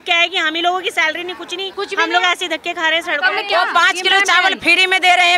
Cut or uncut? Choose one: cut